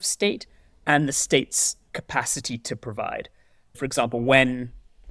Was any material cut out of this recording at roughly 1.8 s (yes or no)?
no